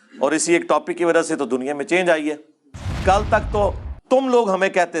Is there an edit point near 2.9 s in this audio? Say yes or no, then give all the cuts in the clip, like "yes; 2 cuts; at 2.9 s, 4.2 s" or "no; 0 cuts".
yes; 1 cut; at 2.9 s